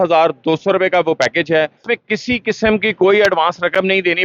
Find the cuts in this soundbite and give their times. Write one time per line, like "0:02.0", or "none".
0:01.8